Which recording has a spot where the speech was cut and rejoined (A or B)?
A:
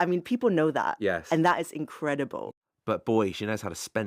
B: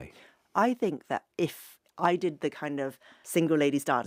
A